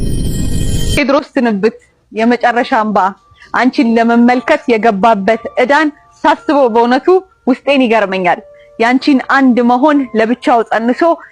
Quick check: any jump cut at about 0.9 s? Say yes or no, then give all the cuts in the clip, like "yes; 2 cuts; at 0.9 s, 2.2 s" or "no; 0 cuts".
yes; 1 cut; at 0.9 s